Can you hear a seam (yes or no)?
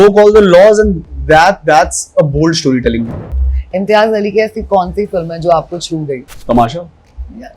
yes